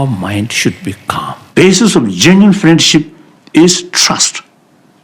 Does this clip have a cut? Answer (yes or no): yes